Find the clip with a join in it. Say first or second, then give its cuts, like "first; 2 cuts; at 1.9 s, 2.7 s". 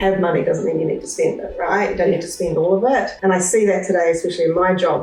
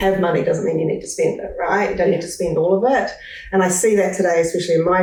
first; 1 cut; at 3.1 s